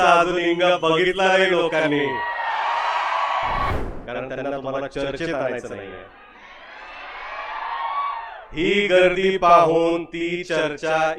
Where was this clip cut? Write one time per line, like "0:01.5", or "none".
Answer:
0:03.7